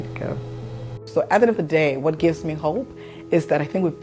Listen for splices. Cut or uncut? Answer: cut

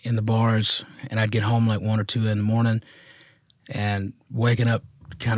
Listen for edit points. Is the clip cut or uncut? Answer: uncut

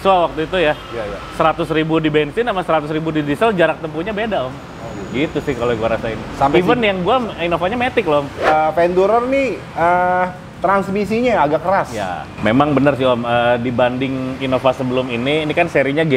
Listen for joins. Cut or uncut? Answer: cut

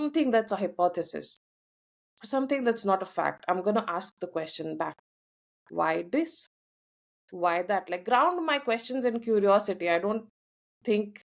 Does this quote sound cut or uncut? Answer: uncut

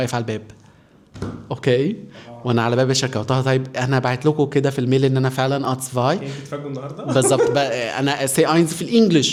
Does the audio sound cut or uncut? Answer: uncut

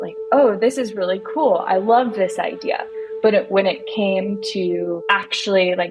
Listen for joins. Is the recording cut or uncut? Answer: uncut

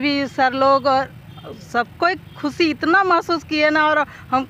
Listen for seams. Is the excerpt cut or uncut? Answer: uncut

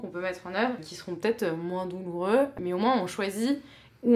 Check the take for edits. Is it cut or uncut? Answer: cut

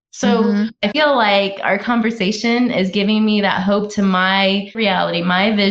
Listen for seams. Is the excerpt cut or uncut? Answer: cut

